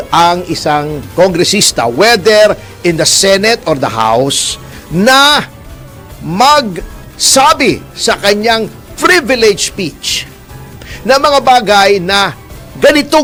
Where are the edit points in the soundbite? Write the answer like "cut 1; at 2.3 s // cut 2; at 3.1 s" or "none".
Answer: none